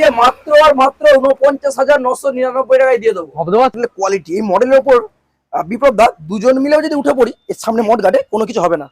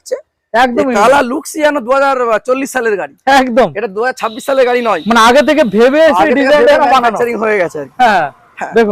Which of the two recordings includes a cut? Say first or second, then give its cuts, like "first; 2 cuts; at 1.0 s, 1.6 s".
first; 1 cut; at 3.8 s